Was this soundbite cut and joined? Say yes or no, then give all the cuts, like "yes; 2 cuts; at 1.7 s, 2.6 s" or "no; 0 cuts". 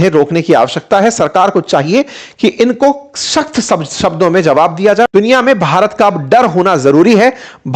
yes; 1 cut; at 5.1 s